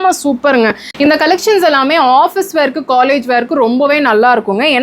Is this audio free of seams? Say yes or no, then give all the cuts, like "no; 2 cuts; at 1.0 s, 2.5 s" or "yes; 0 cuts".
no; 1 cut; at 0.9 s